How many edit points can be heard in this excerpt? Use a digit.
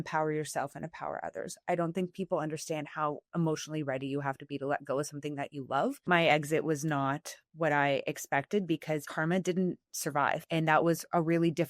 3